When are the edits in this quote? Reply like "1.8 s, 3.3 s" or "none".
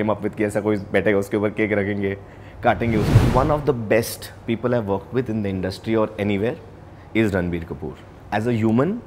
3.1 s

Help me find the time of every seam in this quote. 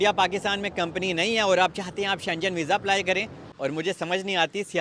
3.4 s

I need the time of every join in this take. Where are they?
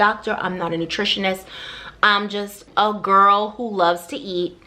2.6 s

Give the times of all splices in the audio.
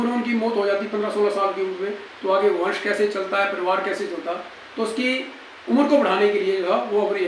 none

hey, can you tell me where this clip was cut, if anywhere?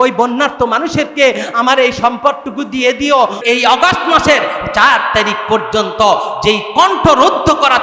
3.4 s

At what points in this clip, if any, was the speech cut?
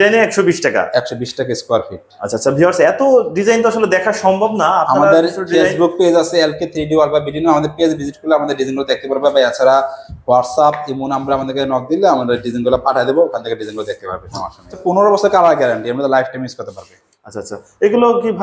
14.8 s

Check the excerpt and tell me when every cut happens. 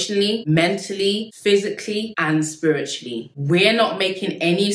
1.3 s, 3.2 s

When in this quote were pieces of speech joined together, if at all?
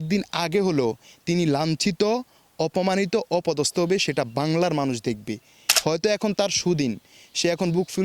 5.6 s

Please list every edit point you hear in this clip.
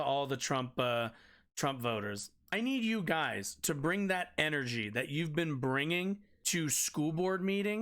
2.5 s, 6.3 s

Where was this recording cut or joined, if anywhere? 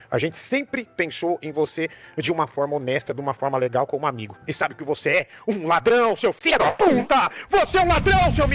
none

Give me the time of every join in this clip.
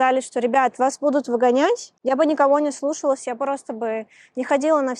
1.9 s

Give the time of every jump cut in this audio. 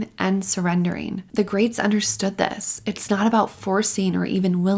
1.2 s

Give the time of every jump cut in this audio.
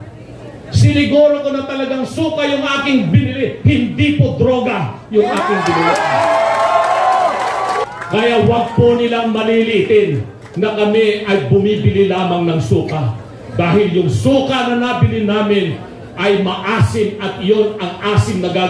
7.8 s

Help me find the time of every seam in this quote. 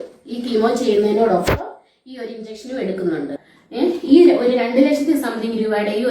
3.5 s

